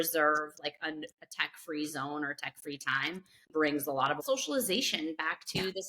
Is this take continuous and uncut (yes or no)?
no